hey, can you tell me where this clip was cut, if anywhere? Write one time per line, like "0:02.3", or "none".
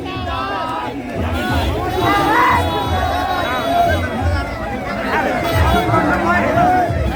none